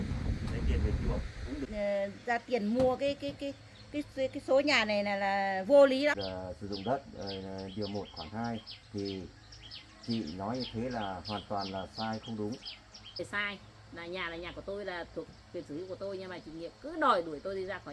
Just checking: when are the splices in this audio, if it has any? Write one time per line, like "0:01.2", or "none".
0:01.7
0:06.2
0:13.2